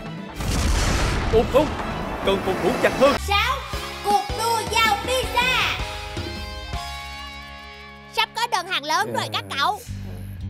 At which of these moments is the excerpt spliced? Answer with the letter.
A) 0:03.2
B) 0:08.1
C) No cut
A